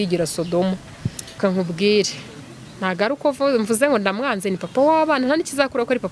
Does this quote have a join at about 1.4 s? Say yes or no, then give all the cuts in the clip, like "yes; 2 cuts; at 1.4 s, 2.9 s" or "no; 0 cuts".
yes; 1 cut; at 1.4 s